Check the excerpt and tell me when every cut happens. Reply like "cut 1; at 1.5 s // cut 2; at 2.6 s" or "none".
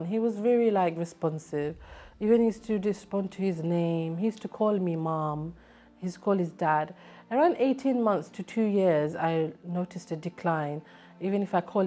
none